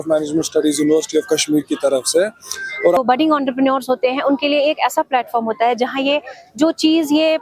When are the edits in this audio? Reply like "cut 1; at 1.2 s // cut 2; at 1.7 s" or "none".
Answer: cut 1; at 3.0 s

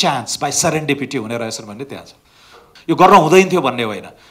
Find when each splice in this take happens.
cut 1; at 2.6 s

